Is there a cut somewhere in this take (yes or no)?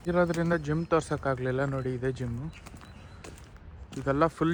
no